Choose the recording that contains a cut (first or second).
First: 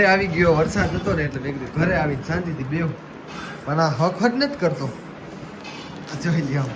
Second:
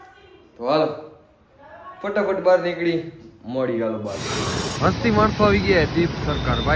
second